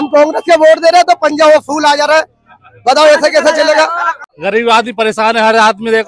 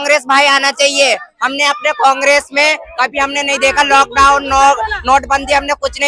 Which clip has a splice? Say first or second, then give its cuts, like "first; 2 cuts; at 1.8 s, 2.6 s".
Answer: first; 1 cut; at 4.3 s